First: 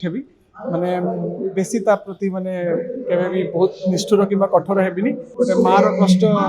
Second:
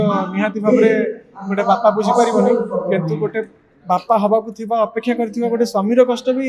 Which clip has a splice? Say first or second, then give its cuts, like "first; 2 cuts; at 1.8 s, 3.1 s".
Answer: first; 1 cut; at 5.2 s